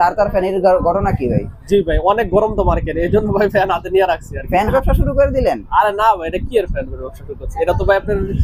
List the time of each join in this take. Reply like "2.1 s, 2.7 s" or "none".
4.7 s